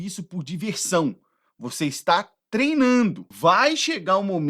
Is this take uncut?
no; 1 cut; at 3.3 s

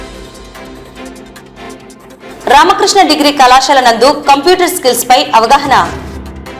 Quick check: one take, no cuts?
yes; 0 cuts

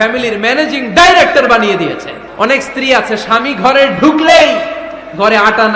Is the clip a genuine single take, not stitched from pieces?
no; 1 cut; at 2.2 s

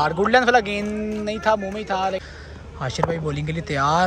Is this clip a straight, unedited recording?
no; 1 cut; at 2.2 s

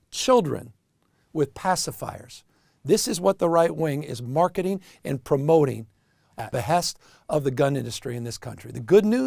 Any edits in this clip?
no; 0 cuts

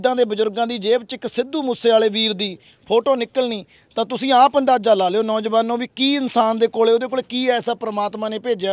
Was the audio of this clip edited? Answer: no; 0 cuts

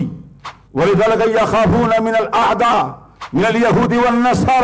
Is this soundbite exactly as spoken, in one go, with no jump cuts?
yes; 0 cuts

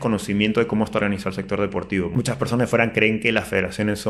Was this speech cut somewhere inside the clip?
yes; 1 cut; at 2.1 s

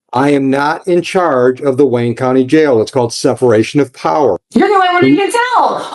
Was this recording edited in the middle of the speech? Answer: yes; 1 cut; at 4.4 s

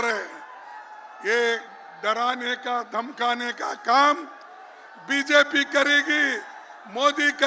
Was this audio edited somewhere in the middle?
no; 0 cuts

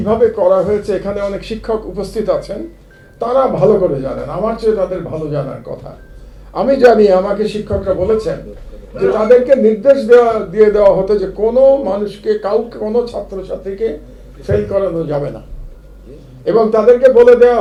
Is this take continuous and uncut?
yes; 0 cuts

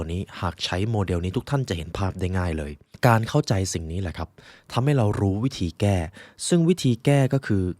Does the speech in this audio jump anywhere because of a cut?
yes; 1 cut; at 2.8 s

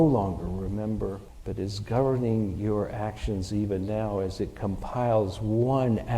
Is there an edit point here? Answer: yes; 1 cut; at 1.3 s

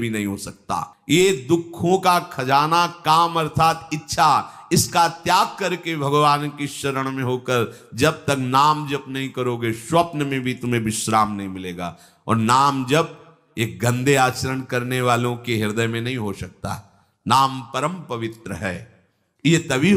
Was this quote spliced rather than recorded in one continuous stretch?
no; 0 cuts

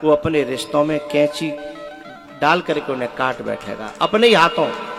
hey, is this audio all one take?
yes; 0 cuts

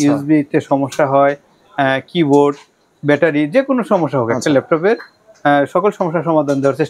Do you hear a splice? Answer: no; 0 cuts

